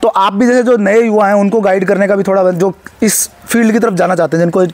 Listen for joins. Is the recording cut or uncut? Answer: uncut